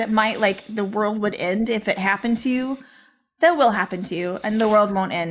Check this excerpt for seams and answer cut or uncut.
uncut